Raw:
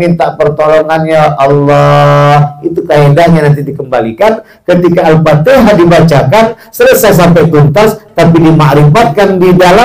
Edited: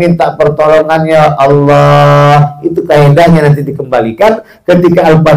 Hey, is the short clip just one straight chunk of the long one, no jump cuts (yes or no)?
yes